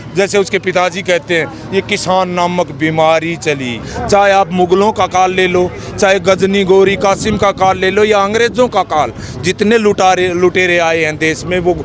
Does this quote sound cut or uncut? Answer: cut